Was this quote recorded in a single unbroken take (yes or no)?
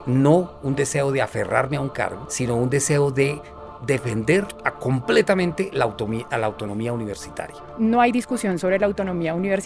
yes